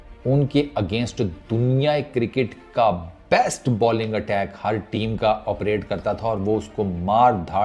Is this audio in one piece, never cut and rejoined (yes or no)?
yes